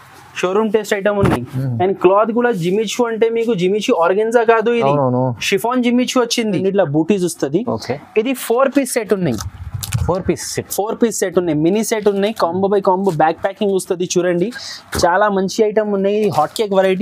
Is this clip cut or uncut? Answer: cut